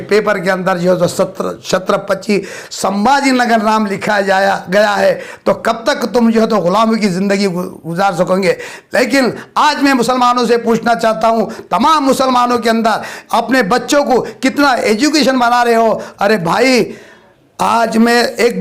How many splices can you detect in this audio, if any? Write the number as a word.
zero